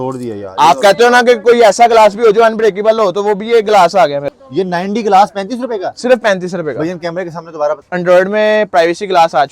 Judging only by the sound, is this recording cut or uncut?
cut